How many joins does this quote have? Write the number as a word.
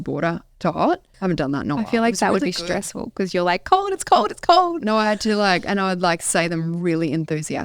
one